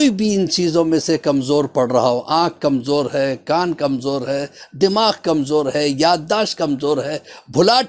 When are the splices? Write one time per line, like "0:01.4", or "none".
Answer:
none